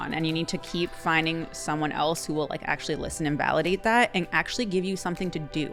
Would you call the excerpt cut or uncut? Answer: uncut